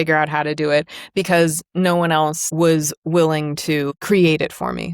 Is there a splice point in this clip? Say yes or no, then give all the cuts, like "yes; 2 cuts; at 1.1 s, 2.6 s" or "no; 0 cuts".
yes; 2 cuts; at 2.4 s, 4.0 s